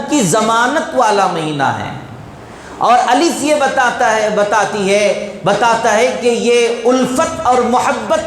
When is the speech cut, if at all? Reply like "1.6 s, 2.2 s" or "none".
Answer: none